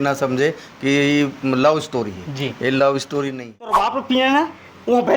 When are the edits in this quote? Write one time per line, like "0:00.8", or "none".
0:03.9

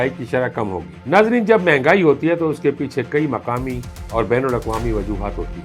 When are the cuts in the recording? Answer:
0:01.0

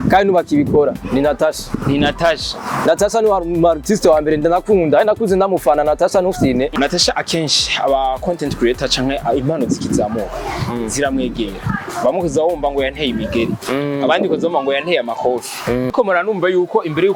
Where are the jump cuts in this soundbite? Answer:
0:06.7
0:15.9

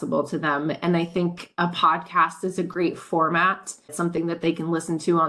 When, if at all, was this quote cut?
0:03.9

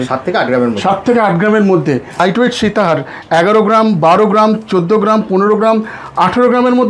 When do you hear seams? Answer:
0:02.2

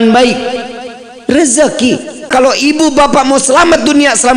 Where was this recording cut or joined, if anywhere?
0:02.2

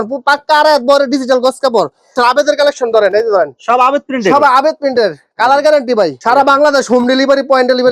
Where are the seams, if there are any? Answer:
0:02.1
0:06.2

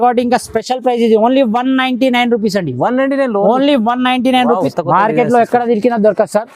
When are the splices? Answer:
0:04.7

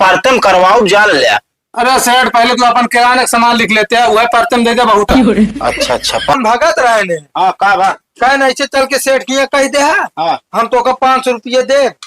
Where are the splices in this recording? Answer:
0:06.3

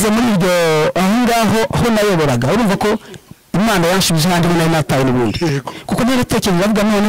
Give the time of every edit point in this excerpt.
none

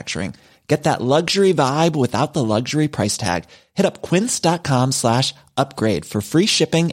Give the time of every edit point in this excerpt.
none

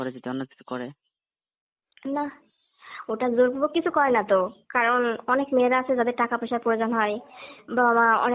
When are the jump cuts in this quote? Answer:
none

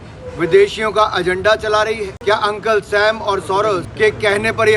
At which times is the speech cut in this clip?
0:02.1
0:03.9

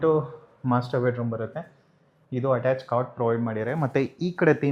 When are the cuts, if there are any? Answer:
none

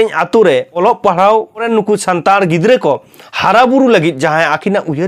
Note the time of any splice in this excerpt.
0:00.8
0:01.7

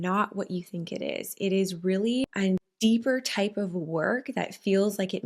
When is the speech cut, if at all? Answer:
0:02.7

